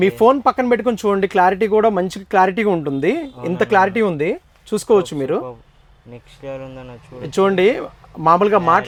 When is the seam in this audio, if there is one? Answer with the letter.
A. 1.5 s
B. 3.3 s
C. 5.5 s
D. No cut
D